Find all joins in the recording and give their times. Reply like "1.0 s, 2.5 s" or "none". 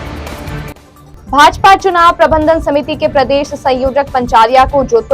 none